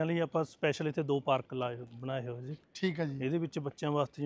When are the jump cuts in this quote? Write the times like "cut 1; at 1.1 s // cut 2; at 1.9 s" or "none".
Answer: none